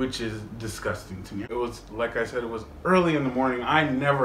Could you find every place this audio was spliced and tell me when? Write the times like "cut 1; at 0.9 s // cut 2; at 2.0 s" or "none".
cut 1; at 1.4 s